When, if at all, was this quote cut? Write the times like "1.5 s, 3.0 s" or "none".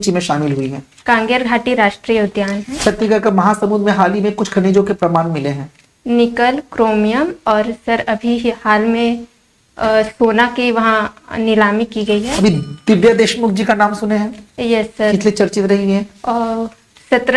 none